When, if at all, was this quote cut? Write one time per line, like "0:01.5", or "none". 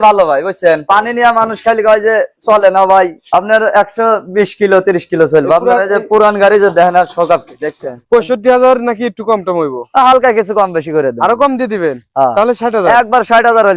0:03.2
0:07.9